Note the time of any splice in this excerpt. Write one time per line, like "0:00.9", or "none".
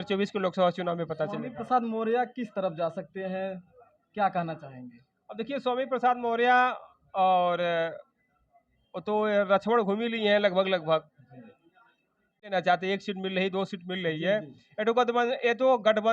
0:12.5